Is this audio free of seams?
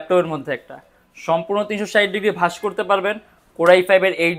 yes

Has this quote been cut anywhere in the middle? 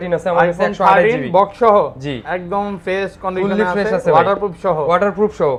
no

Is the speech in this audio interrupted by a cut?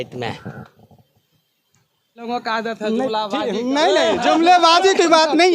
yes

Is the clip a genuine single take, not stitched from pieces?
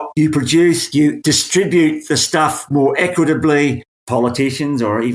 no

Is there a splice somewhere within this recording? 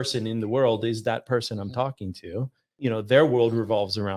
yes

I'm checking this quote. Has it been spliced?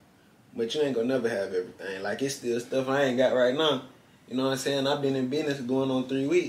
no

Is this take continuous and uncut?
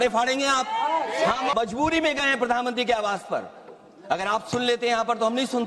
no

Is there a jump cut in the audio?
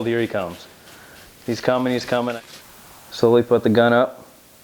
yes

